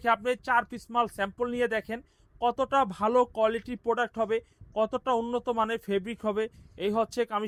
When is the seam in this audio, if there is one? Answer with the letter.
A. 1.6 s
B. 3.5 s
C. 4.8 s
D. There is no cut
D